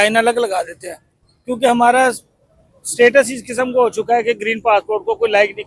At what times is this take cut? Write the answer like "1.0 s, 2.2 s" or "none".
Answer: none